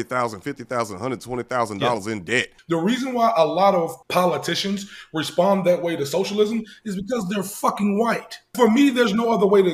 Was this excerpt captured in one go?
no; 3 cuts; at 2.5 s, 4.0 s, 8.5 s

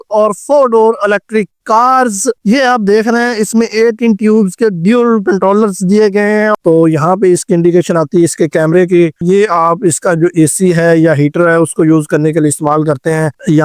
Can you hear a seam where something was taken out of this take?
yes; 3 cuts; at 2.4 s, 6.5 s, 9.2 s

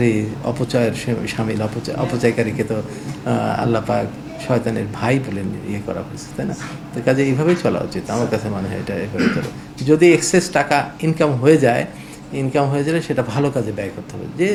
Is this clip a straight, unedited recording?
yes; 0 cuts

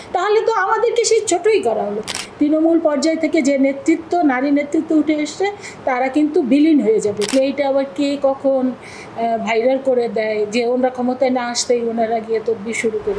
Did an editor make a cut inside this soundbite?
yes; 2 cuts; at 2.2 s, 7.3 s

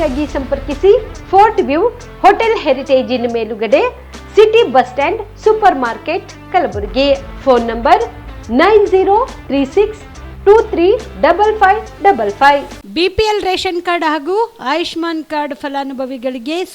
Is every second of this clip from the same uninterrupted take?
no; 1 cut; at 12.8 s

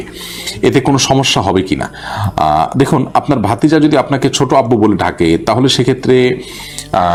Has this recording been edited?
no; 0 cuts

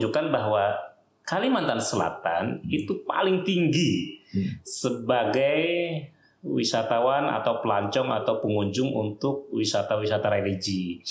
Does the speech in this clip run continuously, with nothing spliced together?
yes; 0 cuts

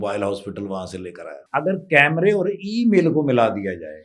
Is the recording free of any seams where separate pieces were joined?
no; 1 cut; at 1.3 s

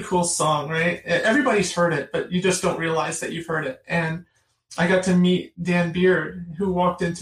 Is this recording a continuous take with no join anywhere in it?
yes; 0 cuts

